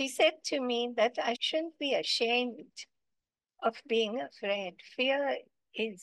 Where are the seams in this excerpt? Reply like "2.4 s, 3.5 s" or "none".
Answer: 1.4 s

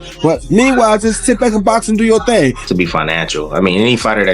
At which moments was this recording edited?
2.6 s

